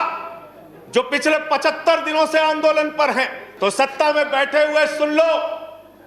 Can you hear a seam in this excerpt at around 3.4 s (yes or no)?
yes